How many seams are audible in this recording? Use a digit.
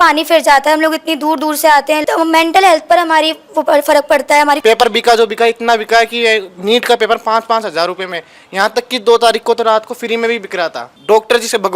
3